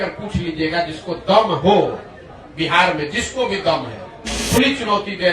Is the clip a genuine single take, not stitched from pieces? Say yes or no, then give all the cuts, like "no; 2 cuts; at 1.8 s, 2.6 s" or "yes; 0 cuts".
no; 1 cut; at 4.3 s